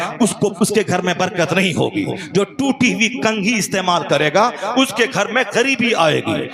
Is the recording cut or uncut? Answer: uncut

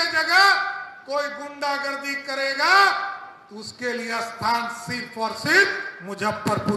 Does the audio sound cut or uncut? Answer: uncut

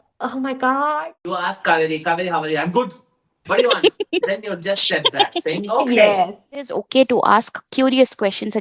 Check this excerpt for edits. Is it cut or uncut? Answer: cut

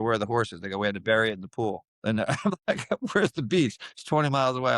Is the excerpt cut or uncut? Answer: uncut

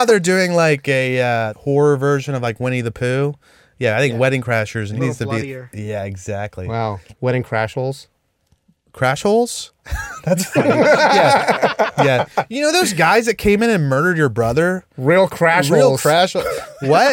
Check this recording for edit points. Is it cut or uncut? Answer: cut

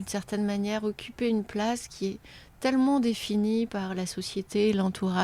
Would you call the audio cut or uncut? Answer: uncut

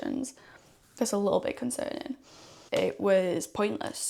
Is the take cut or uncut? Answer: cut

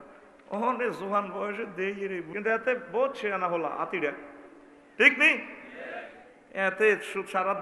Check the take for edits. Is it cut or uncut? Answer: cut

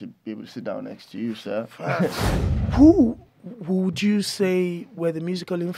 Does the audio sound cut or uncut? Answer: cut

